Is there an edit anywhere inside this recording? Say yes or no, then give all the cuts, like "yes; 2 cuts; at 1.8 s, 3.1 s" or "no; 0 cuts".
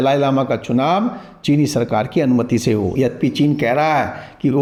no; 0 cuts